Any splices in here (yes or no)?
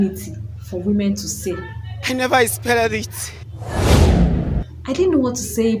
no